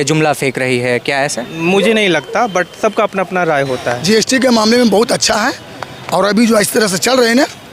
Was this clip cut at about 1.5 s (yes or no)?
yes